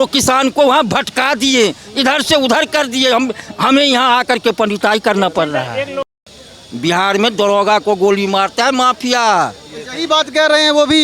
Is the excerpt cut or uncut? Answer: cut